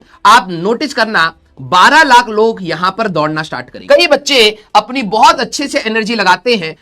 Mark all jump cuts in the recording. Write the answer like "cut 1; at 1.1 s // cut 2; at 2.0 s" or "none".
cut 1; at 3.8 s

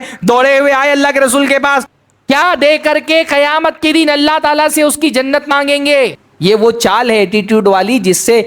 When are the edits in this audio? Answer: cut 1; at 1.9 s // cut 2; at 6.3 s

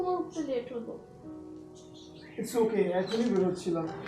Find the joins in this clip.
cut 1; at 2.2 s

